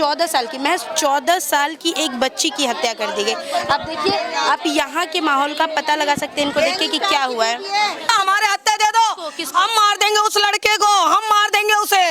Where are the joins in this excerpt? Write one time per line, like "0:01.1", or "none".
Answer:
none